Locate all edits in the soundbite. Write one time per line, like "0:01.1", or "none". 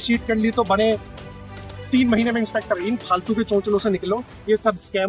none